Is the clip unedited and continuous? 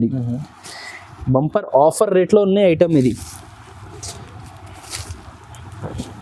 yes; 0 cuts

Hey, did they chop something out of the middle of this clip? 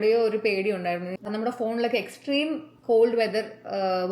yes; 1 cut; at 1.2 s

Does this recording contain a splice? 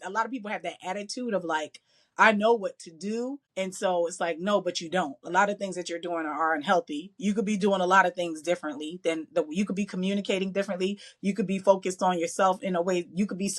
yes; 1 cut; at 3.4 s

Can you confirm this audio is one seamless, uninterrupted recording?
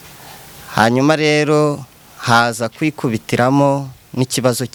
yes; 0 cuts

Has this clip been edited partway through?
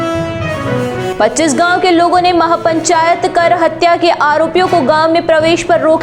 yes; 1 cut; at 1.0 s

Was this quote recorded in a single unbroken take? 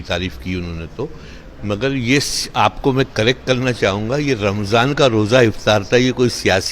yes; 0 cuts

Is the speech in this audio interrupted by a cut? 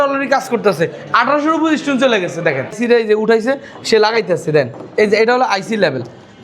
yes; 1 cut; at 2.8 s

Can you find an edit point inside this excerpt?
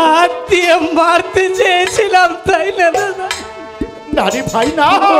no; 0 cuts

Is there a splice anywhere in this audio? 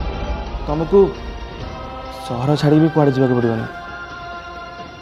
no; 0 cuts

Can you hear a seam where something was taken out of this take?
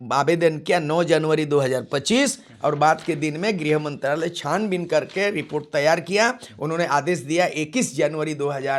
no; 0 cuts

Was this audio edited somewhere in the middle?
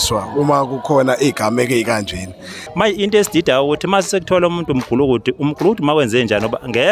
yes; 1 cut; at 2.6 s

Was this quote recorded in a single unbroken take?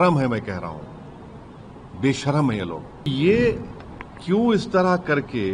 no; 1 cut; at 3.1 s

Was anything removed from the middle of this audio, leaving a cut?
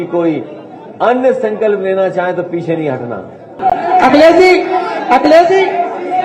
yes; 1 cut; at 3.6 s

